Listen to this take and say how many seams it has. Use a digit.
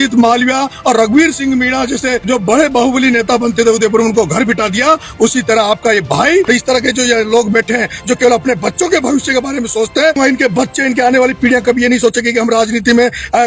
3